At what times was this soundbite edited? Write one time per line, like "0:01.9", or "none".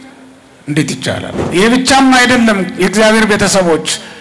0:01.4